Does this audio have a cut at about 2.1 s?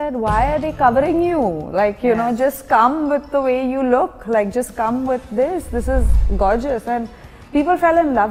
no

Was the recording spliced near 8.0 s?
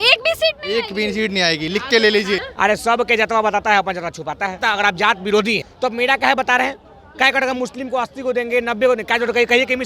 no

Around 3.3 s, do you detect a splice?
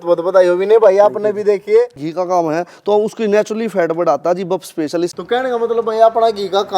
no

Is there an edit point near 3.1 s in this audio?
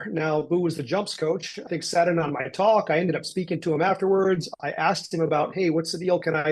no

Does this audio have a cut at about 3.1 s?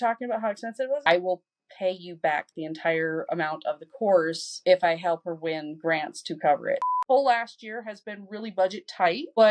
no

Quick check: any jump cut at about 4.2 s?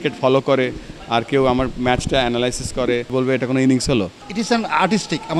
yes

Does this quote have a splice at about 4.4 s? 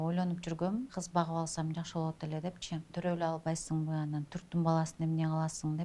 no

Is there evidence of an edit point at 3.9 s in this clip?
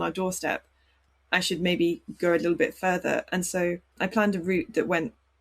yes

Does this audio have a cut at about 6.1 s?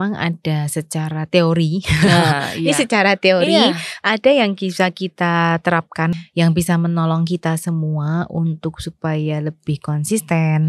yes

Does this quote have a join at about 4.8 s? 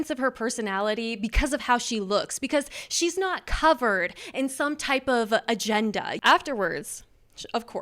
no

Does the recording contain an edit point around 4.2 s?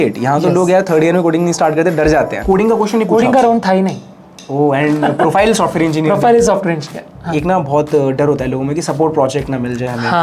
no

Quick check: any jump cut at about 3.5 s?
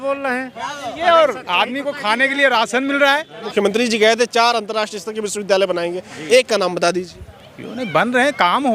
yes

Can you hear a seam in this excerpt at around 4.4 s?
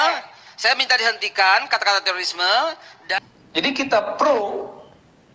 no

